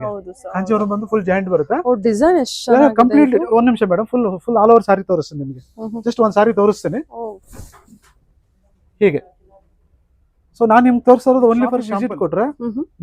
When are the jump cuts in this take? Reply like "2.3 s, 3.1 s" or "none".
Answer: 11.9 s

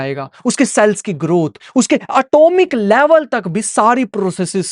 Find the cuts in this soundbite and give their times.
none

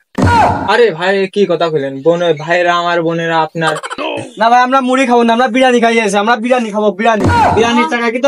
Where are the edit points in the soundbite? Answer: 4.0 s

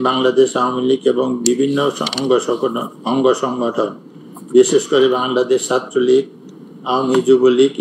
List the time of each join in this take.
none

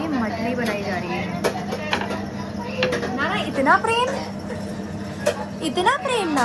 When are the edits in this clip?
none

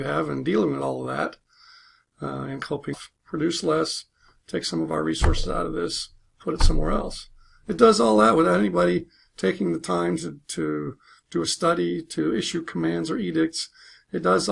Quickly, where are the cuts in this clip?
none

